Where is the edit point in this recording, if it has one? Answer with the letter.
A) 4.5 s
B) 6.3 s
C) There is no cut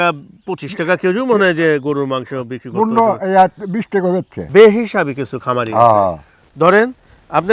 A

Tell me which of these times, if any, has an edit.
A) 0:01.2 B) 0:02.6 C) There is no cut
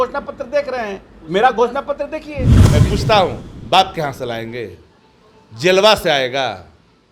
B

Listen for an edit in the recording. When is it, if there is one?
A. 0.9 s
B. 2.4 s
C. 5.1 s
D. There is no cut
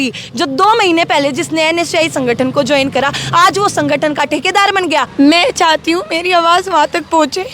C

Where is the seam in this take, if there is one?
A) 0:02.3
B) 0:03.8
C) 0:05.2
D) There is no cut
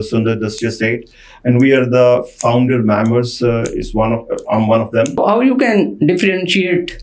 C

